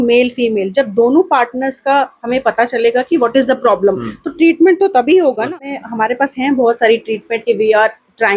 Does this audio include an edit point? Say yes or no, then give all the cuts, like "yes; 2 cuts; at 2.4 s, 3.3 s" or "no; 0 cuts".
yes; 1 cut; at 5.7 s